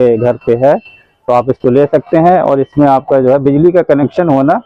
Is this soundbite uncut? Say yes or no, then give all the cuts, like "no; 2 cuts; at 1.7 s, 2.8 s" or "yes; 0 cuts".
yes; 0 cuts